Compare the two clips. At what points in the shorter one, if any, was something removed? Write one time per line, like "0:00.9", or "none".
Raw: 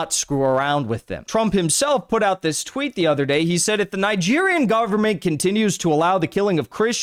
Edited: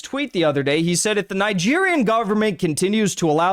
none